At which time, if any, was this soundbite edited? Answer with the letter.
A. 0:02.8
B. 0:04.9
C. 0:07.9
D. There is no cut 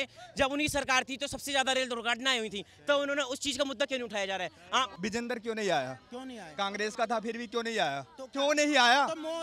B